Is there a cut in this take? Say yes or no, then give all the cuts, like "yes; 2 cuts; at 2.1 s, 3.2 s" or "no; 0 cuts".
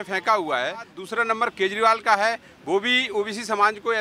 yes; 1 cut; at 1.0 s